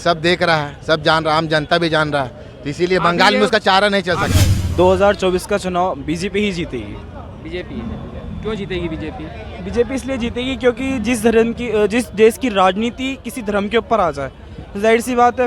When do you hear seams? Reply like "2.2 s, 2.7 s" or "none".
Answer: 4.3 s